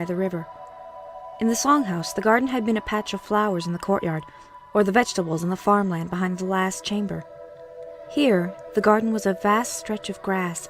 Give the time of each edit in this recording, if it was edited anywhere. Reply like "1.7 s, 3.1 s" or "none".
7.8 s